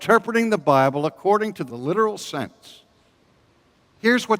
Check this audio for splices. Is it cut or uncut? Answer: cut